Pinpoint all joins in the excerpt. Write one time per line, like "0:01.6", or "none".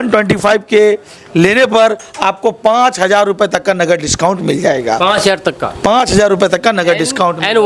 none